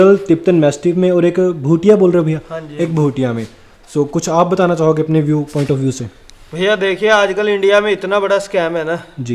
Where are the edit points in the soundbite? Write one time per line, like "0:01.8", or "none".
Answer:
none